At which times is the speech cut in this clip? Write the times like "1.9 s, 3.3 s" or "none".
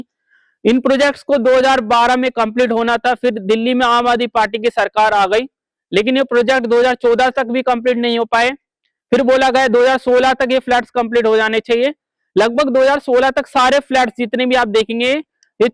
none